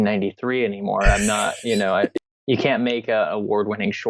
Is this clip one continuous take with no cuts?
no; 1 cut; at 2.1 s

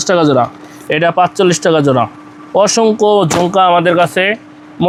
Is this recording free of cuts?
yes; 0 cuts

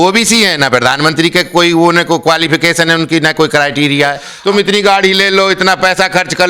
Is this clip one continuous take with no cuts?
no; 1 cut; at 4.3 s

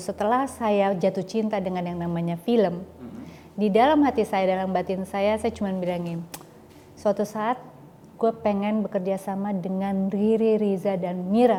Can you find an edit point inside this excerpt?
no; 0 cuts

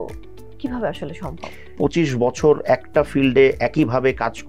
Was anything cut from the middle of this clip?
yes; 1 cut; at 1.7 s

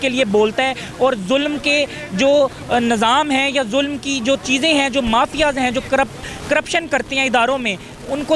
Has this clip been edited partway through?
no; 0 cuts

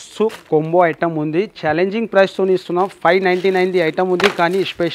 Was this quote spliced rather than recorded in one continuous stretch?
no; 0 cuts

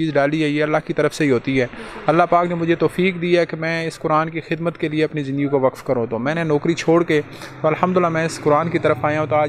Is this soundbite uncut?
yes; 0 cuts

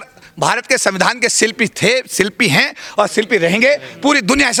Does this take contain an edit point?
no; 0 cuts

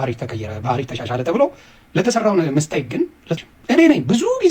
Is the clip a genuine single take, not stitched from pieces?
no; 1 cut; at 3.4 s

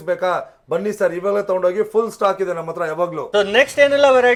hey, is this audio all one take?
yes; 0 cuts

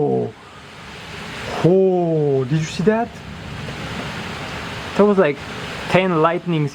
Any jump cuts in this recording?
no; 0 cuts

